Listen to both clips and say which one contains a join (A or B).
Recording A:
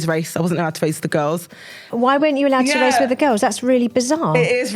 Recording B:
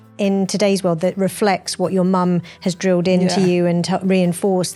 A